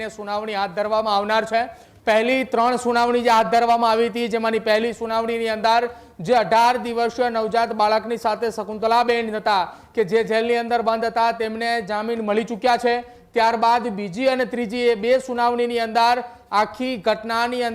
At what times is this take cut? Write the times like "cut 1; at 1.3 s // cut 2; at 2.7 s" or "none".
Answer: none